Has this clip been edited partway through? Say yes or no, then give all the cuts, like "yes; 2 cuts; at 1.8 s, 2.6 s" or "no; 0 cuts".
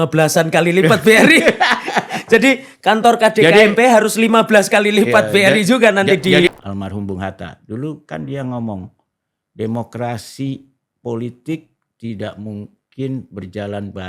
yes; 1 cut; at 6.5 s